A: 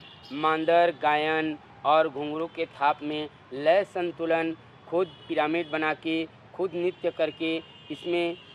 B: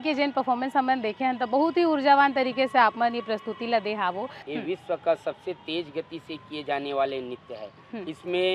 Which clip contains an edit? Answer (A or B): B